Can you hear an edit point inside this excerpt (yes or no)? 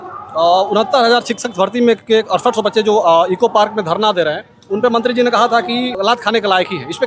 yes